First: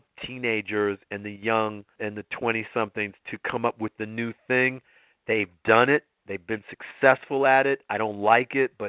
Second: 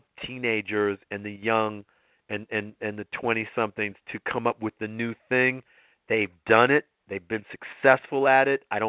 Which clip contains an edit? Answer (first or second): first